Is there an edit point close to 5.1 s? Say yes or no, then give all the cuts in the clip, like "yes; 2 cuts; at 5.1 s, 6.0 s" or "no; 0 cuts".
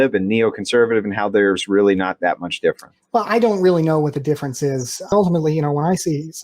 yes; 1 cut; at 5.1 s